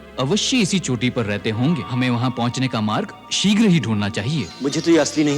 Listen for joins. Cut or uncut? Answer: cut